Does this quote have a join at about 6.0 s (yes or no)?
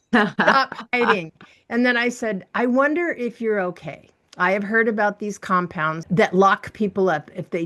yes